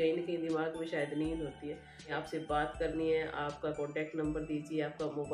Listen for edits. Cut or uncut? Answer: cut